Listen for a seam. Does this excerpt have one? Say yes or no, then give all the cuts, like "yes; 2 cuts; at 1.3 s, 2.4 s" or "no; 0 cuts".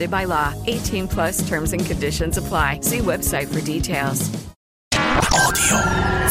yes; 1 cut; at 4.8 s